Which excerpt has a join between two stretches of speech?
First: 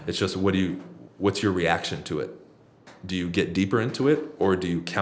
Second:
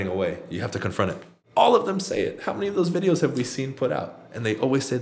second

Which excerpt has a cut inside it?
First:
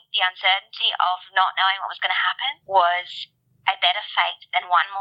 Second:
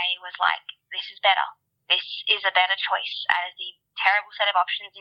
first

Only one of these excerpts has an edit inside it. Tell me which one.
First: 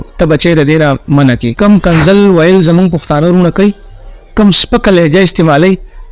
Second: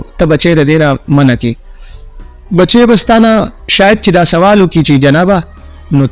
first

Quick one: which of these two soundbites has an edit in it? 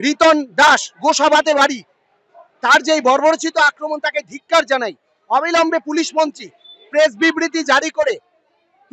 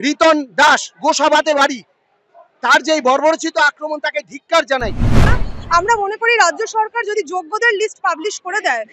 second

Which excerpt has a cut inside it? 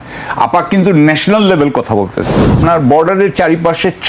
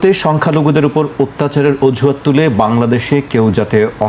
first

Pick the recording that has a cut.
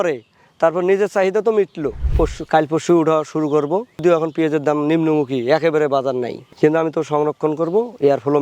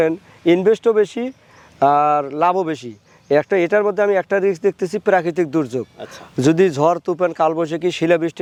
first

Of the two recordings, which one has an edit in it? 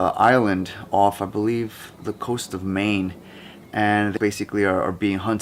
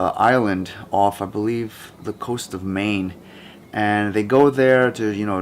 second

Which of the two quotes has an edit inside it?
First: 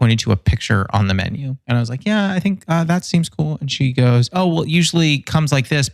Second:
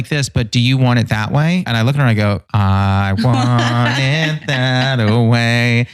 second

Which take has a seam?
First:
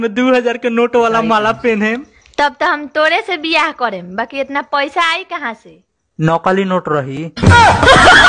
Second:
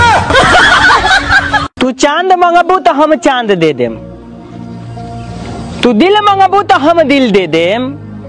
second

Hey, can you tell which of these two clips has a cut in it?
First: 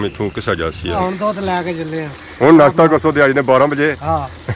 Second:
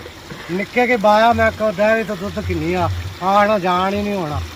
first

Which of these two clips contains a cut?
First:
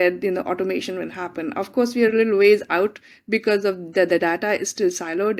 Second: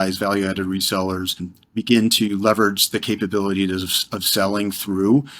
second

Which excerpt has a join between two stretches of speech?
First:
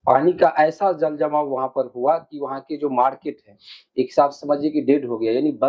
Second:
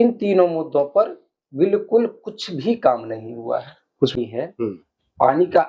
second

